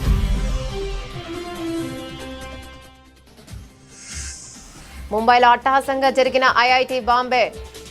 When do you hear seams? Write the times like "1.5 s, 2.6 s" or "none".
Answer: 4.6 s

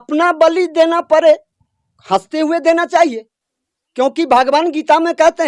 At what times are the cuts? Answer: none

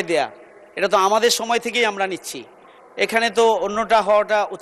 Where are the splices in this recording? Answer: none

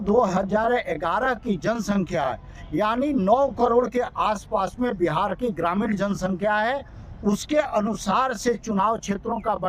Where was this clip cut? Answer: none

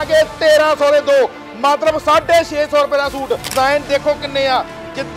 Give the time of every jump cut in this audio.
3.5 s

